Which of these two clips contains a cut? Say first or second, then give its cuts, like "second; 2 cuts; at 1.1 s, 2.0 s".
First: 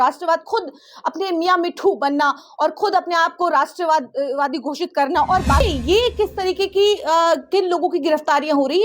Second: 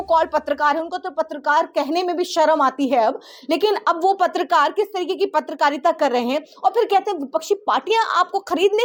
first; 1 cut; at 5.6 s